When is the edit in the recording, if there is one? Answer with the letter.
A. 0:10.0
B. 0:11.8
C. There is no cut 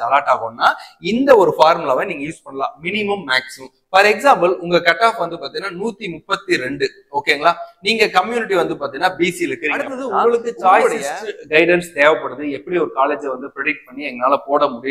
A